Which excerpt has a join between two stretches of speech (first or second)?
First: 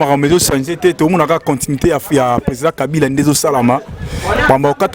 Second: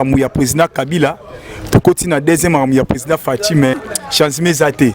second